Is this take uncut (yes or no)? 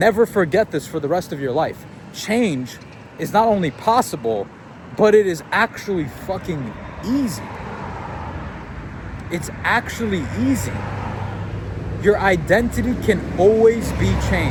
yes